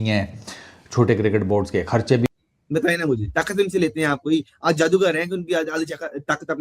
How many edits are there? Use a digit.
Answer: 1